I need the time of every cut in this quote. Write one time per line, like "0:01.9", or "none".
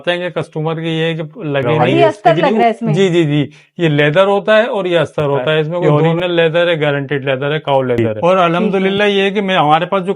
0:01.7
0:05.8
0:08.0